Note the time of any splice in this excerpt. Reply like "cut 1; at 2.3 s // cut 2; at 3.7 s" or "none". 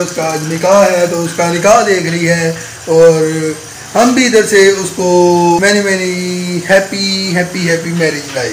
cut 1; at 5.6 s